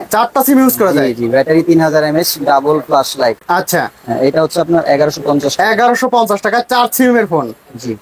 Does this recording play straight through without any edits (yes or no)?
yes